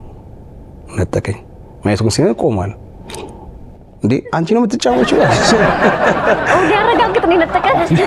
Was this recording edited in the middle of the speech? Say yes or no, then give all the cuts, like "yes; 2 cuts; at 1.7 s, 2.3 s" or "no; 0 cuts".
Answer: no; 0 cuts